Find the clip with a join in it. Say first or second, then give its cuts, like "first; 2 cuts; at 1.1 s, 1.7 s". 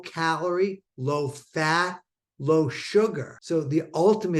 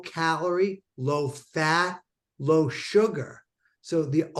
first; 1 cut; at 3.3 s